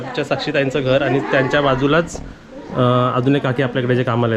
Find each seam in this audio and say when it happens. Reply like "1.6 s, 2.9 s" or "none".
none